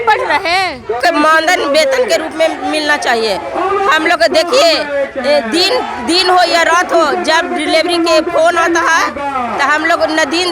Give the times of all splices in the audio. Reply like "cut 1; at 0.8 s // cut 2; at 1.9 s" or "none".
none

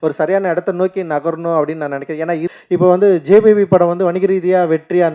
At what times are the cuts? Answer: cut 1; at 2.5 s

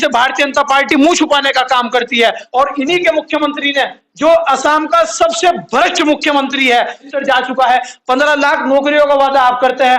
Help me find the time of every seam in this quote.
cut 1; at 2.4 s // cut 2; at 7.1 s

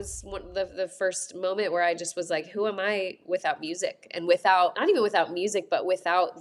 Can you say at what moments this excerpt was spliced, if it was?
cut 1; at 4.8 s

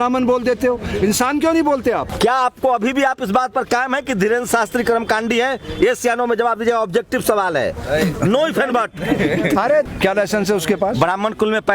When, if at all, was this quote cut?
cut 1; at 2.1 s // cut 2; at 9.9 s

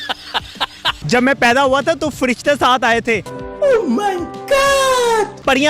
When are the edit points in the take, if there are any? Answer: cut 1; at 1.0 s

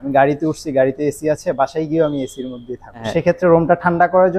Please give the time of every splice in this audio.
cut 1; at 3.1 s

